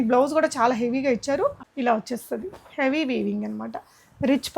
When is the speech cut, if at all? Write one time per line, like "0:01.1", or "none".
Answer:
0:01.7